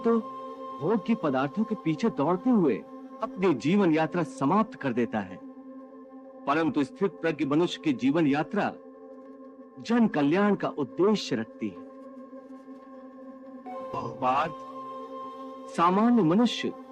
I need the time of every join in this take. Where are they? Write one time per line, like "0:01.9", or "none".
none